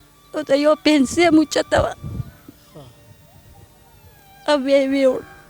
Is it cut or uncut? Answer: uncut